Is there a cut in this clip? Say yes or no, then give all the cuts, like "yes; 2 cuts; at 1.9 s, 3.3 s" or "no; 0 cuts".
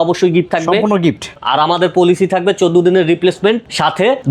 yes; 1 cut; at 1.3 s